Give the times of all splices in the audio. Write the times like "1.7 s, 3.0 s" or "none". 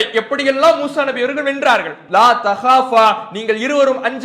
2.0 s